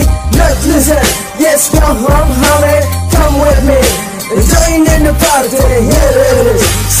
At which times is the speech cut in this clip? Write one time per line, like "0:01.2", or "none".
none